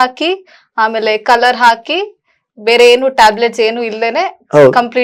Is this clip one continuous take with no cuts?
yes; 0 cuts

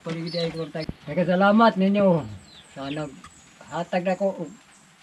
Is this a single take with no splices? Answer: no; 1 cut; at 0.9 s

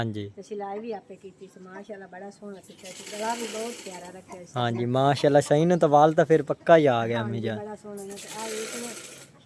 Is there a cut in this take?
no; 0 cuts

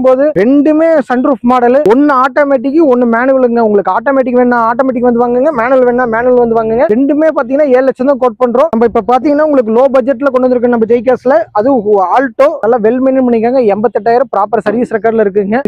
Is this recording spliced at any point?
yes; 3 cuts; at 6.9 s, 8.7 s, 12.6 s

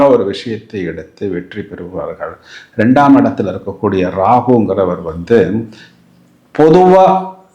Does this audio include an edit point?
no; 0 cuts

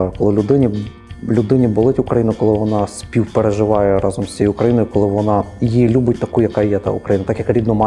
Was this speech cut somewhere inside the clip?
no; 0 cuts

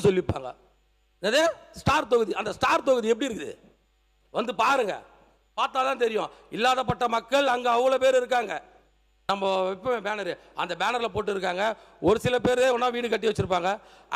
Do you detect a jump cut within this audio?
yes; 1 cut; at 9.1 s

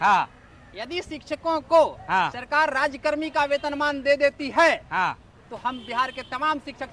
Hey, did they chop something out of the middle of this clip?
no; 0 cuts

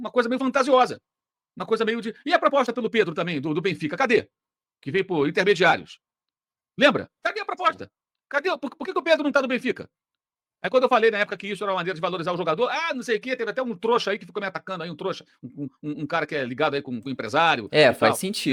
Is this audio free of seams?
yes; 0 cuts

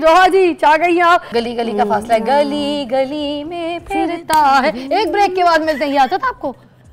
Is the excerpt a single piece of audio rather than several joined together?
no; 1 cut; at 1.3 s

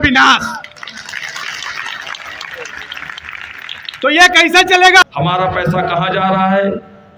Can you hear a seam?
yes; 1 cut; at 5.1 s

